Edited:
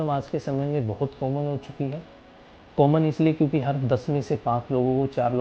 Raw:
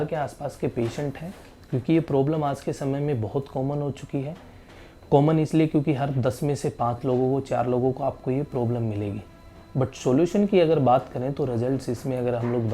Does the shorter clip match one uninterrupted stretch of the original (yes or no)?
yes